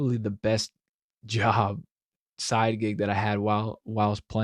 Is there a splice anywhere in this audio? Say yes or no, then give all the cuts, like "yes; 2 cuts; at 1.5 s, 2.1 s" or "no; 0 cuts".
no; 0 cuts